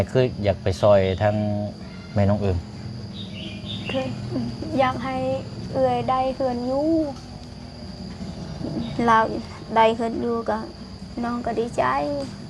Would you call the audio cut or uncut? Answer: uncut